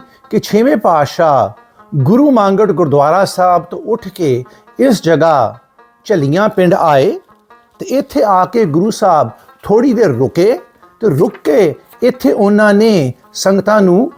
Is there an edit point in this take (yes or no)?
no